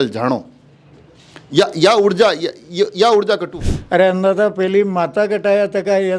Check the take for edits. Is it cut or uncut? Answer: cut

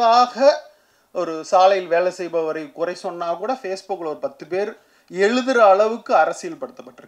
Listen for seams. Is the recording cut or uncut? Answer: uncut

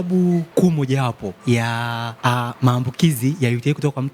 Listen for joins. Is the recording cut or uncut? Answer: uncut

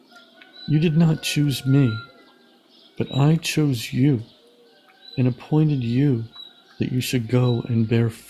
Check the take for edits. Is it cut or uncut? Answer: uncut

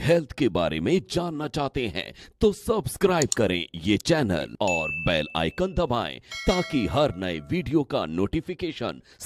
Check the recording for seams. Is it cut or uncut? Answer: uncut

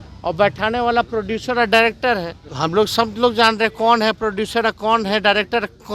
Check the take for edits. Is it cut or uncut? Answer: cut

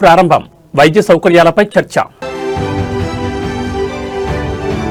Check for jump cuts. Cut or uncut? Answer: uncut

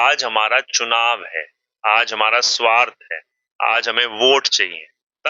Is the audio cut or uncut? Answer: uncut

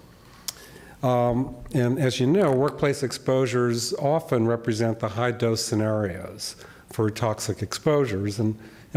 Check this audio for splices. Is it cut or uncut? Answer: uncut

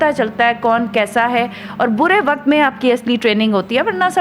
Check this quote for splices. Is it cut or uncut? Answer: uncut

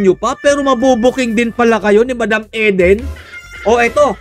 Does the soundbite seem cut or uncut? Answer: uncut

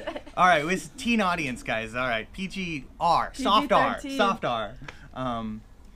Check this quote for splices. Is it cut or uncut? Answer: uncut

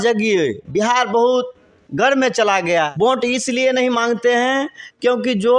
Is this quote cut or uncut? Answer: cut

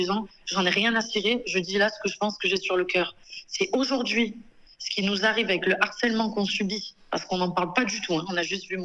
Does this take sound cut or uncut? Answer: uncut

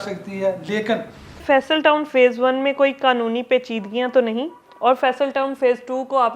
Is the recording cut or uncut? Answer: cut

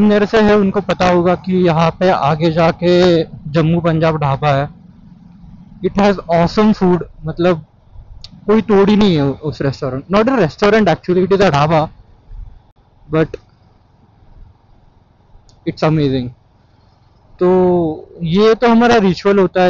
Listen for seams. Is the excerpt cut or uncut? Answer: uncut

